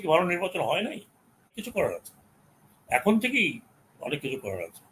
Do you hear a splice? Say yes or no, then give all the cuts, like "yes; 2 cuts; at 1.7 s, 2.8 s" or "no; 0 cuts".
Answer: yes; 1 cut; at 1.6 s